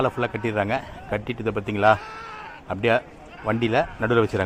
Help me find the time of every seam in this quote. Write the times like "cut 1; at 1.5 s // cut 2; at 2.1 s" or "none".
none

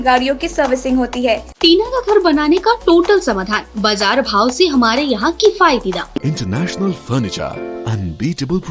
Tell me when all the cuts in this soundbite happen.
cut 1; at 1.5 s // cut 2; at 6.2 s

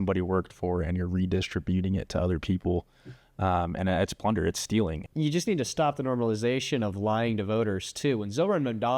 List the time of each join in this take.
cut 1; at 5.0 s

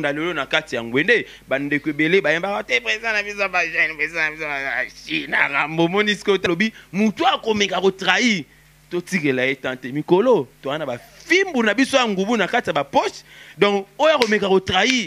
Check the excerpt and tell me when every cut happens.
cut 1; at 6.5 s

